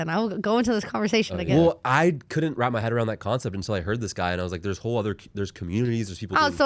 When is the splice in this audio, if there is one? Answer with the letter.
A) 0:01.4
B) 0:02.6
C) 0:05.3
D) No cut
A